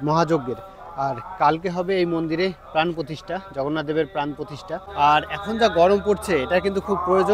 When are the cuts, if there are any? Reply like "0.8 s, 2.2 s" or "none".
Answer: 4.8 s